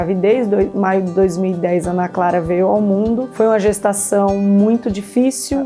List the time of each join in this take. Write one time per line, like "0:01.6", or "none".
0:03.3

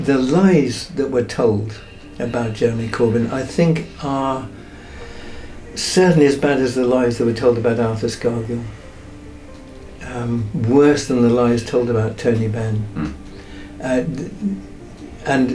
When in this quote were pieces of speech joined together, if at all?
none

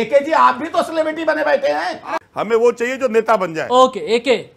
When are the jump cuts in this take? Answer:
0:02.2

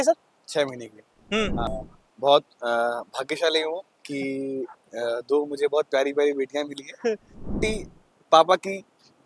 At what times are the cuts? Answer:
0:01.7
0:07.6

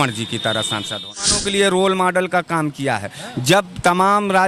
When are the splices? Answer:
0:01.4

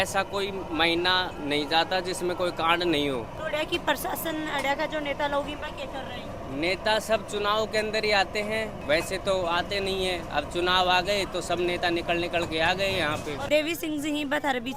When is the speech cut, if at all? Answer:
none

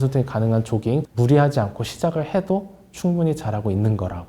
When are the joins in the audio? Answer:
0:01.1

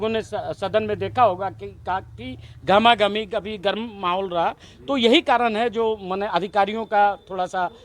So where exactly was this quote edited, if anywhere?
none

